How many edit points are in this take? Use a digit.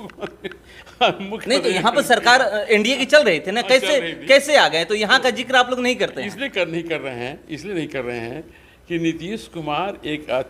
0